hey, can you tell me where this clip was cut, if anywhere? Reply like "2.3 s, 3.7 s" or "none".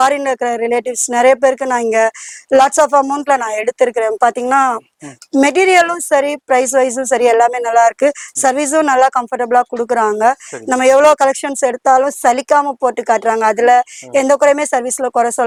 none